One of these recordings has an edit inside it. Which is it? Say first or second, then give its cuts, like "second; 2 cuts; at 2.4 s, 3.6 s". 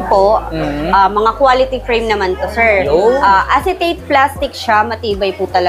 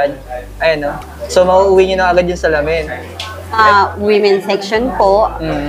second; 1 cut; at 3.6 s